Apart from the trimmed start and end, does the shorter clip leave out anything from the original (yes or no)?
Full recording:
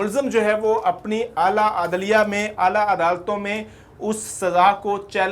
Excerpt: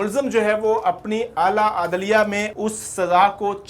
yes